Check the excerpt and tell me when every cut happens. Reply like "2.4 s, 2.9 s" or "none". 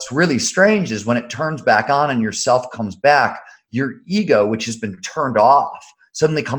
none